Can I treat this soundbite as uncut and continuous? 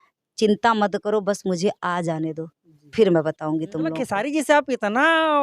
no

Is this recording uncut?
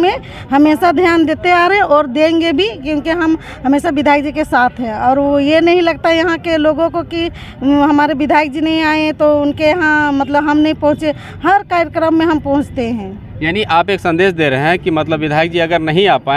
yes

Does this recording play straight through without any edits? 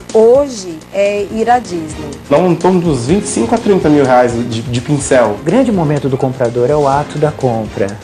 no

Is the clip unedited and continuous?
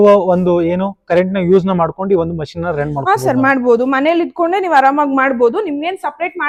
yes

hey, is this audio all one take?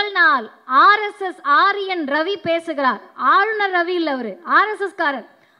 yes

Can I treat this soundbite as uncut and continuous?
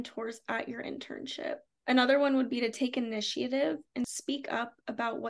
no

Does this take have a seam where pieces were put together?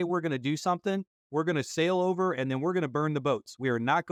no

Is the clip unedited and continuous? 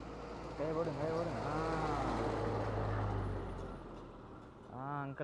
yes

